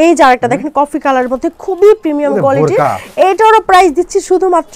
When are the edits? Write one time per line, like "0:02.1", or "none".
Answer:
none